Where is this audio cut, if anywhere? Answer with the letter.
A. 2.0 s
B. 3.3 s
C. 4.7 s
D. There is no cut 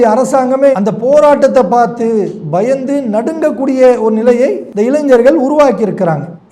C